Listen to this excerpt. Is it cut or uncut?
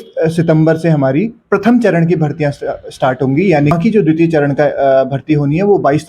cut